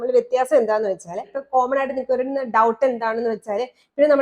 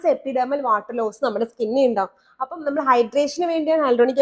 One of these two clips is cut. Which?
first; 1 cut; at 1.4 s

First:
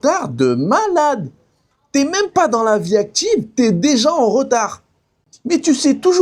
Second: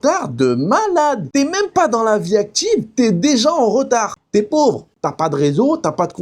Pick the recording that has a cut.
second; 2 cuts; at 1.2 s, 4.2 s

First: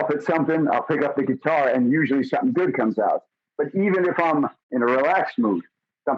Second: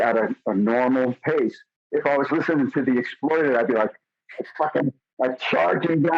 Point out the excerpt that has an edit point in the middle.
first; 1 cut; at 4.6 s

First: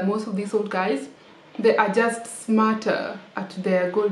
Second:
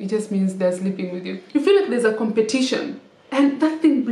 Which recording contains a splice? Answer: second; 1 cut; at 1.4 s

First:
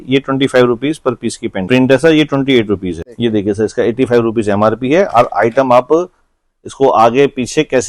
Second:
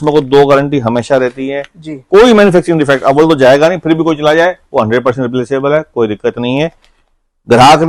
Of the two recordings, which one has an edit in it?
first; 2 cuts; at 1.6 s, 3.1 s

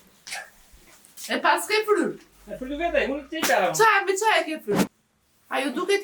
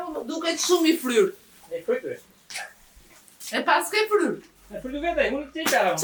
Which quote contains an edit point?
first; 1 cut; at 4.8 s

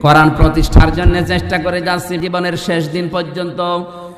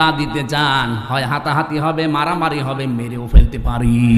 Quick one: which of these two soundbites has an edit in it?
first; 1 cut; at 2.2 s

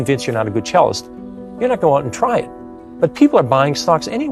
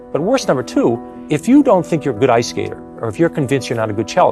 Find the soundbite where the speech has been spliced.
second; 1 cut; at 1.1 s

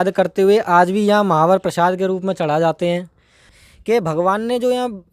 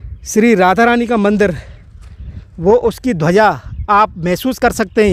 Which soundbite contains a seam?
first; 1 cut; at 3.5 s

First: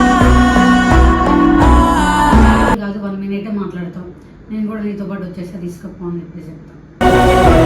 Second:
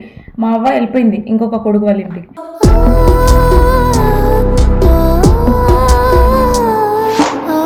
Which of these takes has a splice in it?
first; 1 cut; at 2.8 s

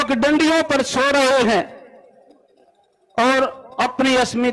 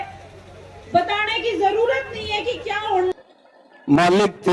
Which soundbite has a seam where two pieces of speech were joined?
second; 1 cut; at 3.1 s

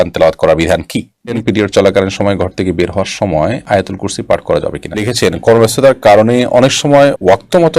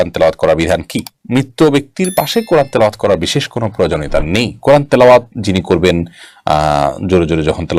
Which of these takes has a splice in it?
first; 2 cuts; at 1.2 s, 5.1 s

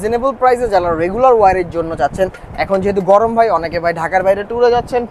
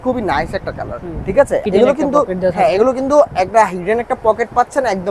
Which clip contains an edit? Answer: second; 1 cut; at 1.6 s

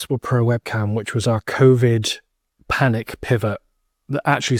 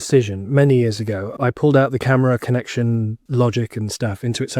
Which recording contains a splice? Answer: second; 2 cuts; at 1.3 s, 3.2 s

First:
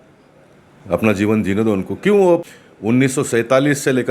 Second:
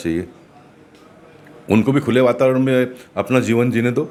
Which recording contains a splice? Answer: first; 1 cut; at 2.6 s

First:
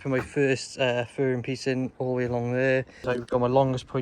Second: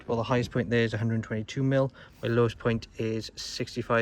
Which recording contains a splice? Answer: first; 1 cut; at 3.0 s

